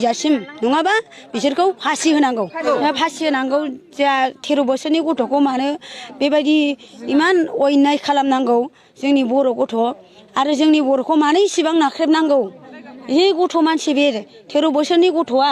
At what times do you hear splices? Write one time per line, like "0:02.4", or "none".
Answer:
0:02.6